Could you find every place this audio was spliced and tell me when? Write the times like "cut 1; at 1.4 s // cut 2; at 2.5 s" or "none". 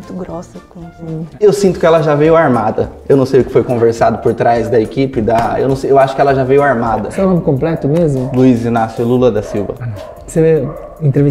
cut 1; at 1.2 s // cut 2; at 7.1 s